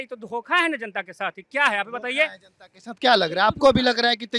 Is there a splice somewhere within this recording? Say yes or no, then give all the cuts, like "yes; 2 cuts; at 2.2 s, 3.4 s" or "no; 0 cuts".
no; 0 cuts